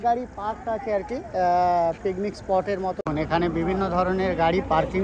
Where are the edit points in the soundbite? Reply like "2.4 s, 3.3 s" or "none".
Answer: 3.0 s